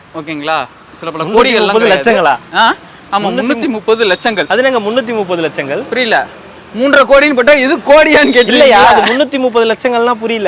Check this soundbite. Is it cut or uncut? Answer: uncut